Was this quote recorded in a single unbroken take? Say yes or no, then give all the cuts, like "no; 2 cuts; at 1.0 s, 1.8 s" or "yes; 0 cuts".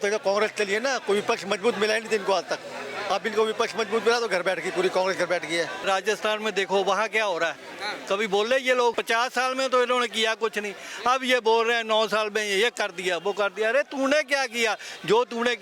no; 2 cuts; at 5.8 s, 9.0 s